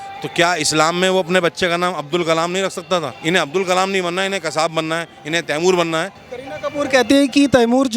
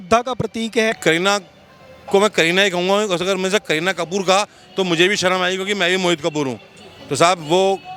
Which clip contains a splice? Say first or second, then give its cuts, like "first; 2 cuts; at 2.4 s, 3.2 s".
first; 2 cuts; at 3.1 s, 6.2 s